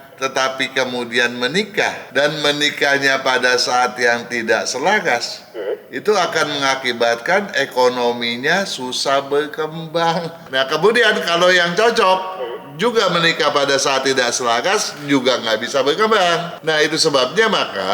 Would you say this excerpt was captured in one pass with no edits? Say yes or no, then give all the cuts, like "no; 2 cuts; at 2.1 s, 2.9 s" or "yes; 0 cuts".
no; 3 cuts; at 2.0 s, 10.4 s, 16.5 s